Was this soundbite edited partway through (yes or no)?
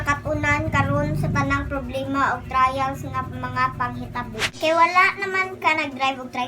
yes